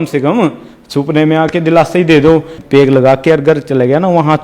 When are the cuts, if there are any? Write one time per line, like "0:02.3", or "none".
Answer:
0:02.6